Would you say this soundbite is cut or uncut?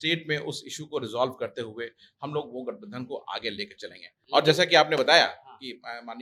uncut